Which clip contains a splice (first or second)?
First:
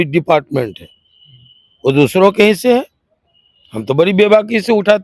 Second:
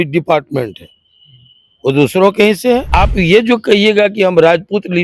second